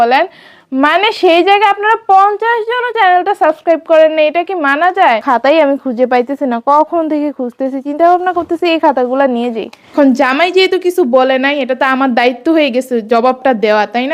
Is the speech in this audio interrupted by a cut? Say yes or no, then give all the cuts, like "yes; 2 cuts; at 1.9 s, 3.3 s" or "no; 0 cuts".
yes; 2 cuts; at 5.2 s, 9.8 s